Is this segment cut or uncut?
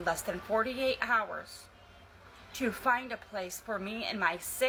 uncut